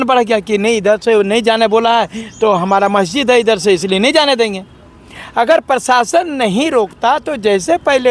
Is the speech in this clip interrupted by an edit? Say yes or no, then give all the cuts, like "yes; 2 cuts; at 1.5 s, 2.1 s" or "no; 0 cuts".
no; 0 cuts